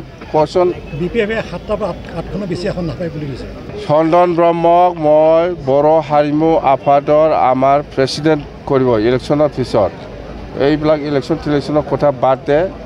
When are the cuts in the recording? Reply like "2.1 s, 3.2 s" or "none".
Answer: 3.7 s